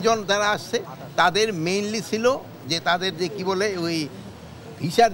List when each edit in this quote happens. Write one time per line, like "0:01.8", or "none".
none